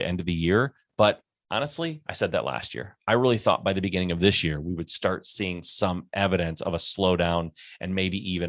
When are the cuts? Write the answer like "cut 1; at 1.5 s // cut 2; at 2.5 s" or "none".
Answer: none